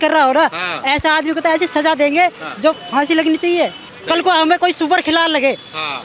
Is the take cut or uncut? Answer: cut